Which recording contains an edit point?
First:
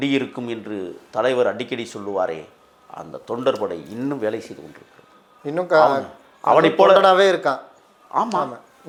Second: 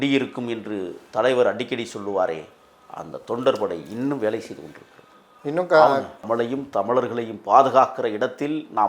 second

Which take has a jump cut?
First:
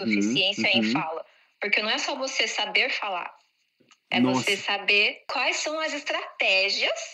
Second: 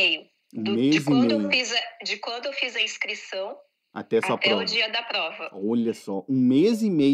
first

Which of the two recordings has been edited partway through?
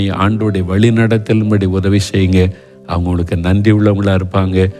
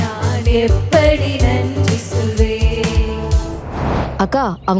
second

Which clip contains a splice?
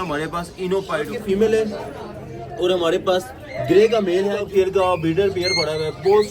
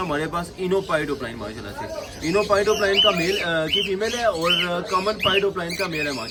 first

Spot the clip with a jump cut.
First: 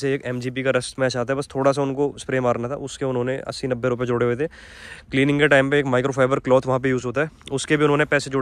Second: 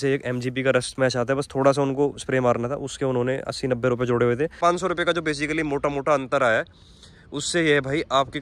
second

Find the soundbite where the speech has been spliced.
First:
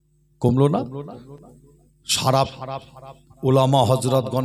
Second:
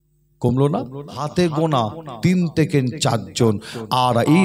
second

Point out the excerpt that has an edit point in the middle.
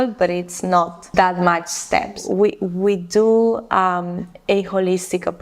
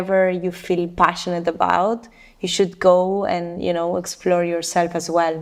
first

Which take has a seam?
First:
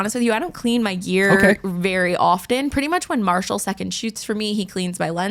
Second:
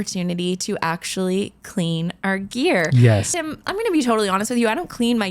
second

